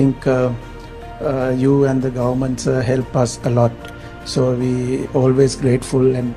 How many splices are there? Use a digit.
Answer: 0